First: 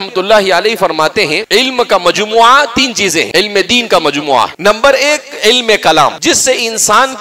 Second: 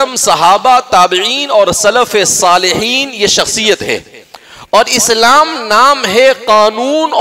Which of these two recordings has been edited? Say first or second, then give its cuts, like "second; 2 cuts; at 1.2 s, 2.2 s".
first; 4 cuts; at 1.4 s, 3.3 s, 4.5 s, 6.2 s